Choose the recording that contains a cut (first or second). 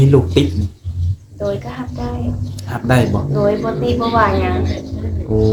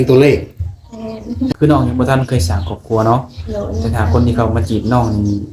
second